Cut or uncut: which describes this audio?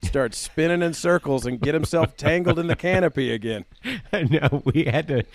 uncut